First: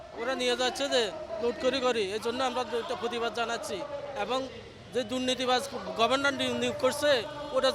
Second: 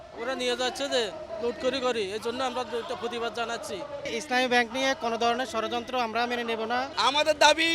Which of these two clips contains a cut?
second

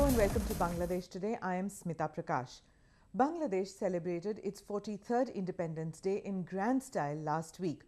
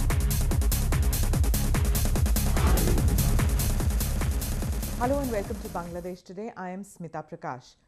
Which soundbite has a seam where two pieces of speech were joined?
first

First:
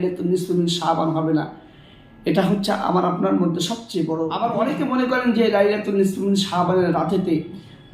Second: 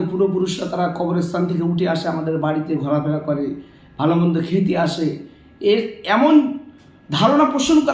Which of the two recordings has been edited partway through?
first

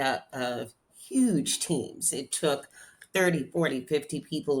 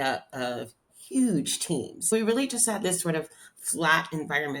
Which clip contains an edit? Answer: second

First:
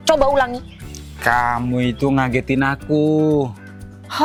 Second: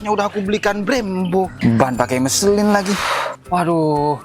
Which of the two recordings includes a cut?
second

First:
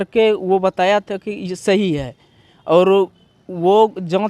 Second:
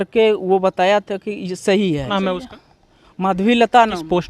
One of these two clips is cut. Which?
second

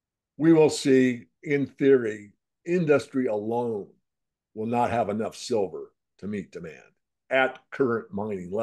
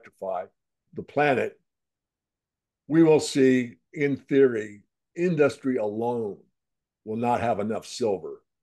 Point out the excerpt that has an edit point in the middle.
second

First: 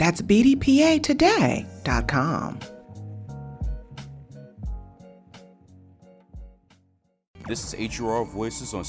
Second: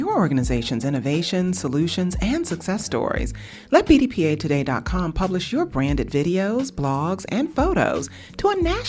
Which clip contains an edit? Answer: first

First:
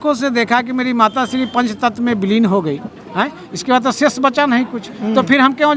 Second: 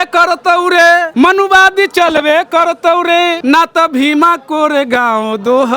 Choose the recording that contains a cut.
second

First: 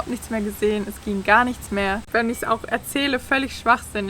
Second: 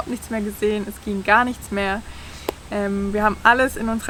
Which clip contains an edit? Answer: first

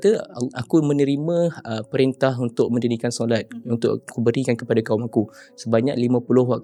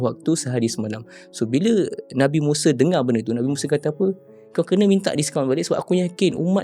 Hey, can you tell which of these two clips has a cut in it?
second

